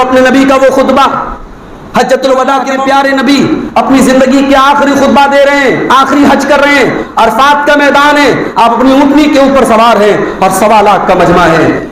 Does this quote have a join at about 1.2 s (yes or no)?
no